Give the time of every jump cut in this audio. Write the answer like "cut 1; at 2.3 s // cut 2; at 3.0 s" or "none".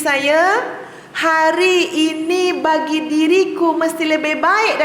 none